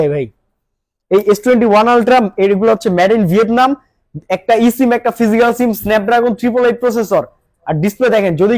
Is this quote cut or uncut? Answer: uncut